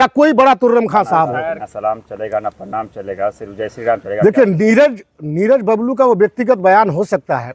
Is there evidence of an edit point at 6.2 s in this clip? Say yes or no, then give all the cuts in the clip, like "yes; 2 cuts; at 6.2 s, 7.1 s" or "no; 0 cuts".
no; 1 cut; at 1.6 s